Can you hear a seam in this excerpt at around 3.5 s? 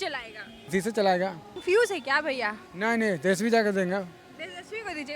no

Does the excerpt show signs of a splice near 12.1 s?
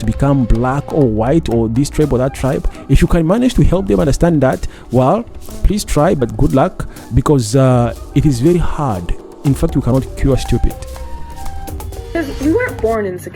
yes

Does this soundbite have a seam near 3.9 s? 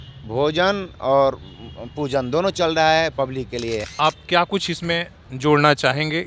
yes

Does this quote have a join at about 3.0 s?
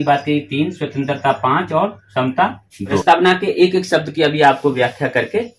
yes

